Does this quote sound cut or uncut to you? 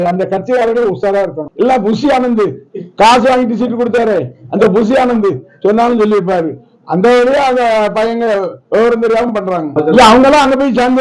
cut